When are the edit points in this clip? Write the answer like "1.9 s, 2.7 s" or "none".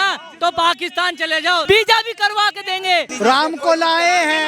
1.6 s, 3.1 s